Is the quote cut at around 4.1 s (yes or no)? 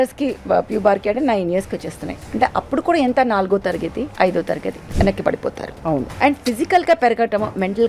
yes